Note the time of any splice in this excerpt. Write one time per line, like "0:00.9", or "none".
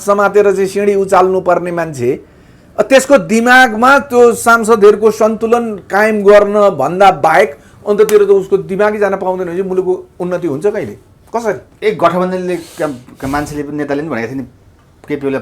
none